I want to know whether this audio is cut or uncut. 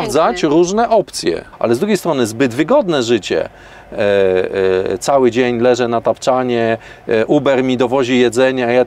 cut